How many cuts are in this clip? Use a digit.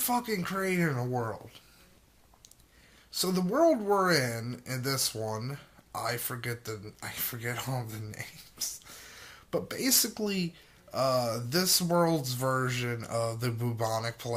1